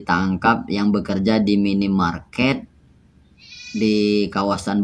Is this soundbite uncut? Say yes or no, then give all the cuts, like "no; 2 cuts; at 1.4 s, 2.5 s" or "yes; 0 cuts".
yes; 0 cuts